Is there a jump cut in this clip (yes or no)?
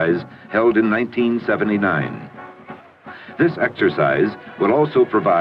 yes